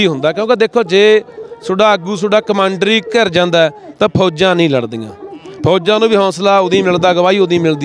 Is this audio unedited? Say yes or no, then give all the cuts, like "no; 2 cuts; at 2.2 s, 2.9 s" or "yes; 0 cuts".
yes; 0 cuts